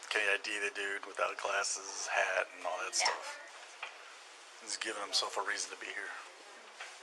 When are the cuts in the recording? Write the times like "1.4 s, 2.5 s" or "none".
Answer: 3.5 s